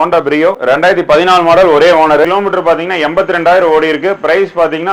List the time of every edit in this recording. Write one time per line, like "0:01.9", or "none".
0:02.3